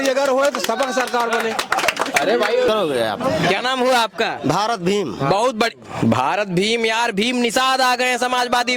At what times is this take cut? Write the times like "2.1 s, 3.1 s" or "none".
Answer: 2.7 s